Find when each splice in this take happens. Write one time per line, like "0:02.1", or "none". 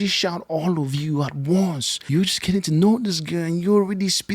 0:01.9